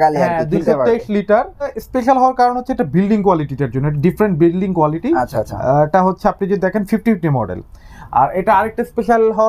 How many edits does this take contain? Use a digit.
1